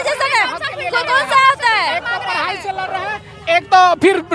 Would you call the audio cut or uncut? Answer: uncut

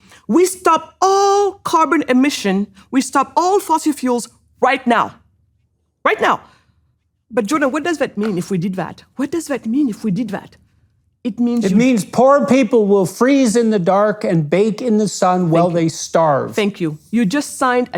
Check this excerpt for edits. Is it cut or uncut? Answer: uncut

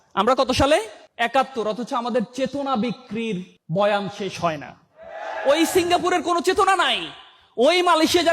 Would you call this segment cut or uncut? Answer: cut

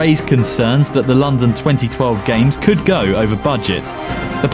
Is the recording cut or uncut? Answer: uncut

